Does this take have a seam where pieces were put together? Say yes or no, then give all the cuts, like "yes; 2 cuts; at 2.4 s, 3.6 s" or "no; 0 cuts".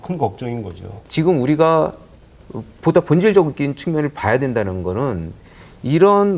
no; 0 cuts